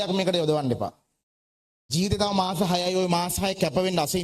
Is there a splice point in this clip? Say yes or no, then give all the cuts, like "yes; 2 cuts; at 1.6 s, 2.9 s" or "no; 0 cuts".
no; 0 cuts